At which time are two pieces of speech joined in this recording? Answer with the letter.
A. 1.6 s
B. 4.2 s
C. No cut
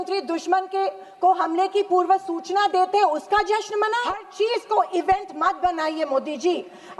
B